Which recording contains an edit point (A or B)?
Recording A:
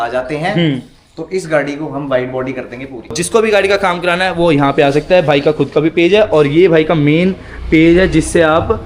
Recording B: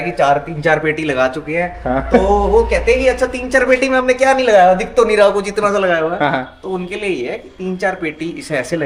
A